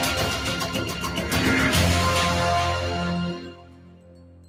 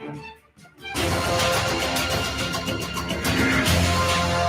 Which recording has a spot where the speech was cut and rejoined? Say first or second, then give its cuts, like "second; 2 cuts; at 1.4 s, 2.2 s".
second; 1 cut; at 1.0 s